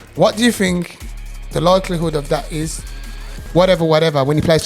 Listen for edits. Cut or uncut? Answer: cut